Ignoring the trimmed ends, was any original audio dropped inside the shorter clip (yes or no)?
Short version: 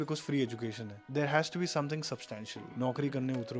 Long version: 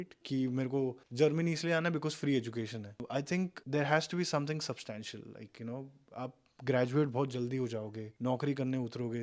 yes